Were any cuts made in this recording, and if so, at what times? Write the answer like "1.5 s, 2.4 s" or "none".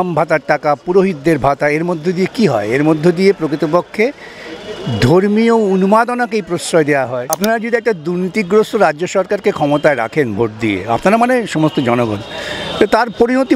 7.3 s